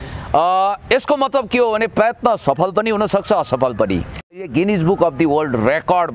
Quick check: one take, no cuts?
no; 1 cut; at 4.5 s

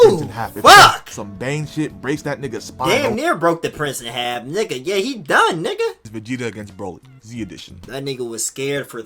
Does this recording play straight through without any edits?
no; 2 cuts; at 6.1 s, 7.9 s

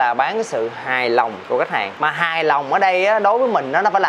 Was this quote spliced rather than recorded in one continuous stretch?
no; 0 cuts

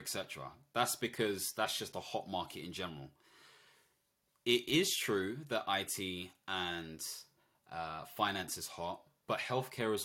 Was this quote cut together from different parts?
no; 0 cuts

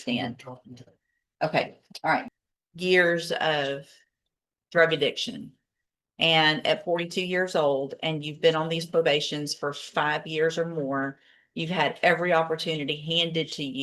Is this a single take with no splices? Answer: no; 1 cut; at 2.3 s

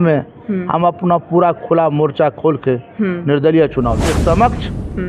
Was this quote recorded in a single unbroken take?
no; 1 cut; at 4.1 s

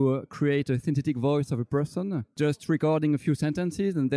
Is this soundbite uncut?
no; 1 cut; at 2.2 s

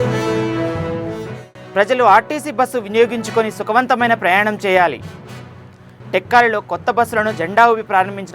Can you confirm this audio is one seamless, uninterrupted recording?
no; 1 cut; at 1.4 s

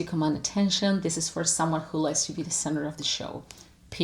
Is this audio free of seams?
yes; 0 cuts

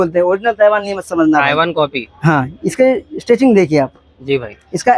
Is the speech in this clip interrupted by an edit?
no; 0 cuts

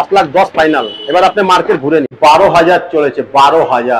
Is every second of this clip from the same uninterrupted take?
no; 1 cut; at 2.1 s

